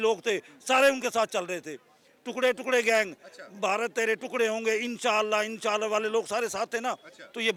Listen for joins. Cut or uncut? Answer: uncut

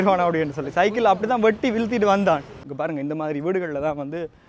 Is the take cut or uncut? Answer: cut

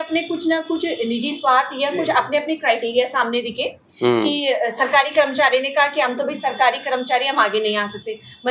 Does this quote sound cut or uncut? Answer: uncut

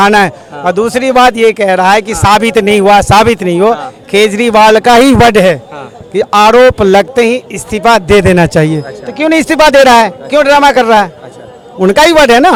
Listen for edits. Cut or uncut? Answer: uncut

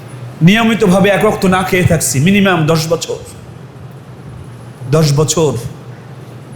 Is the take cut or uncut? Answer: uncut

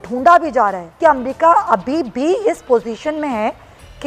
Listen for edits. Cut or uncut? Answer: cut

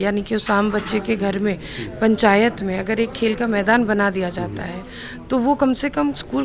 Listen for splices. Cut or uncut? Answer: uncut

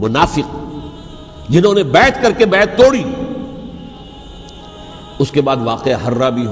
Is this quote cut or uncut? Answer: cut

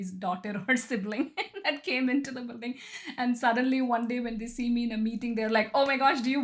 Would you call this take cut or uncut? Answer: uncut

